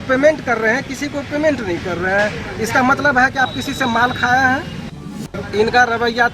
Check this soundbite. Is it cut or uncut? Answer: cut